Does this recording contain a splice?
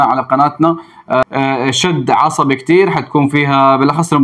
yes; 1 cut; at 1.2 s

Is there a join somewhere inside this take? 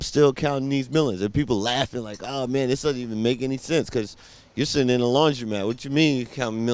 no; 0 cuts

